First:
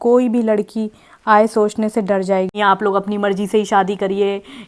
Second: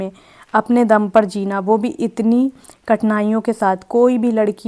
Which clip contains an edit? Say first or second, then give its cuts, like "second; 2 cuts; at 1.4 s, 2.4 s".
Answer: first; 1 cut; at 2.5 s